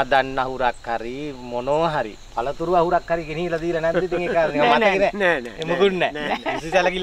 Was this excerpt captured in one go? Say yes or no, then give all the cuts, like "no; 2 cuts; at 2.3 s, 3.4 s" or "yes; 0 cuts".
yes; 0 cuts